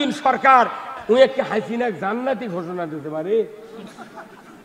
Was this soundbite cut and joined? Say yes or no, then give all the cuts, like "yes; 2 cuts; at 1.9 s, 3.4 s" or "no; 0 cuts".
yes; 1 cut; at 0.9 s